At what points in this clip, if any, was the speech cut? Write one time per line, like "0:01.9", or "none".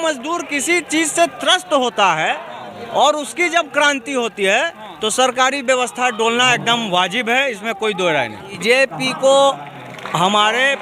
0:08.6